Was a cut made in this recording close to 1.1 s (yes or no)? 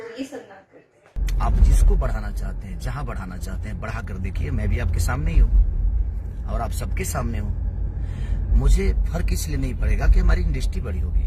yes